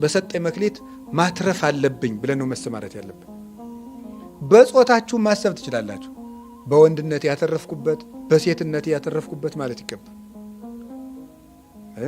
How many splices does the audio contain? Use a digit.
2